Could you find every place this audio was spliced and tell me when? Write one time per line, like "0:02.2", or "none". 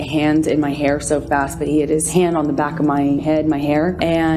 0:02.1
0:03.4